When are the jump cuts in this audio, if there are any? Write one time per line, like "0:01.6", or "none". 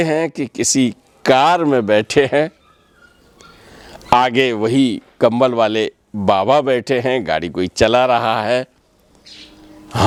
none